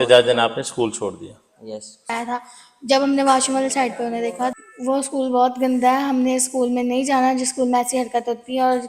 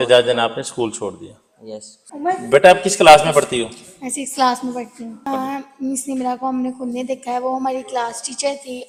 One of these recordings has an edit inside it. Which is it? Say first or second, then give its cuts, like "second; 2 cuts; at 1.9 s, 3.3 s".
first; 2 cuts; at 2.1 s, 4.5 s